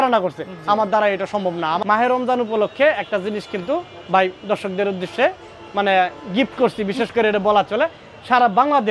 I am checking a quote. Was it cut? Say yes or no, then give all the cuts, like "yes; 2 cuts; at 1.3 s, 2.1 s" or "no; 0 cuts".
yes; 1 cut; at 1.8 s